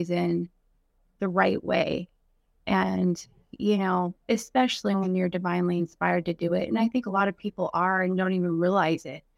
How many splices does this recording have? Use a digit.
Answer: 0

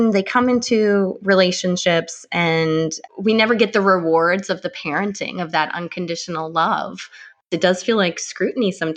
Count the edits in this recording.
2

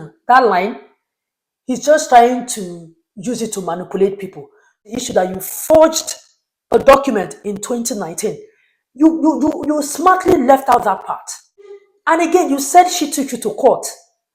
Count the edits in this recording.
2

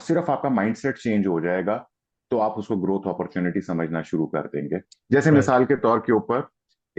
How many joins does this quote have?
1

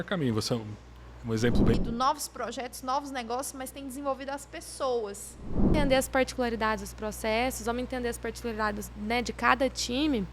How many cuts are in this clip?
2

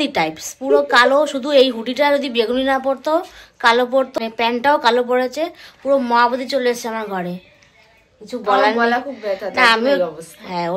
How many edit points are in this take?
1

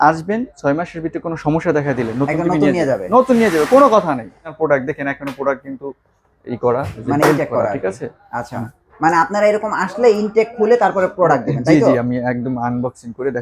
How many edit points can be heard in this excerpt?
1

